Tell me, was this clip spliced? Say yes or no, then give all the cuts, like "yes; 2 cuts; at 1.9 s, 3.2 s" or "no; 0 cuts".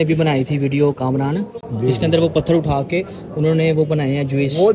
no; 0 cuts